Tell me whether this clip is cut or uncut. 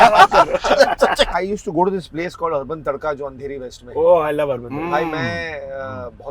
cut